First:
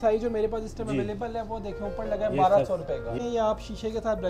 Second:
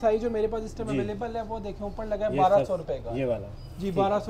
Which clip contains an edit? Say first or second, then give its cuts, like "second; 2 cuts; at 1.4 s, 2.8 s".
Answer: first; 1 cut; at 3.2 s